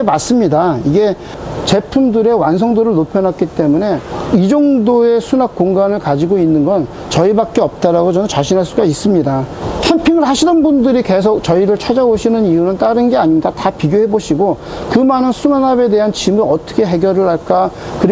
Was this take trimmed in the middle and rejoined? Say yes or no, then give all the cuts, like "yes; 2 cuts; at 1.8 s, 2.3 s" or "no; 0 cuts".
no; 0 cuts